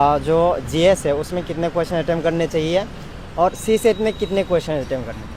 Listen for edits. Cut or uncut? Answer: uncut